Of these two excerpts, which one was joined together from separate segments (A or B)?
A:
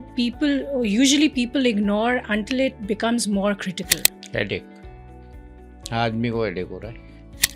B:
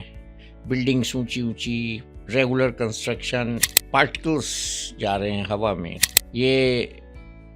B